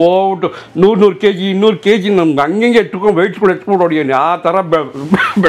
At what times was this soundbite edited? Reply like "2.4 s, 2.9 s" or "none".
none